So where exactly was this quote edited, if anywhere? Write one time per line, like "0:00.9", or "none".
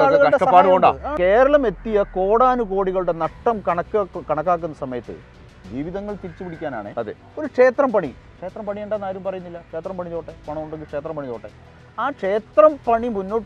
0:01.1